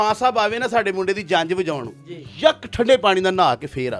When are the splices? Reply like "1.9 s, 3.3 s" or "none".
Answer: none